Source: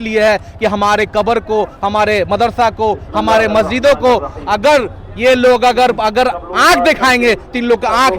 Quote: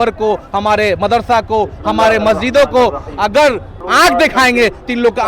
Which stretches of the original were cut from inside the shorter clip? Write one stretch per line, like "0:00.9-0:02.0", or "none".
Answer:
0:05.1-0:06.4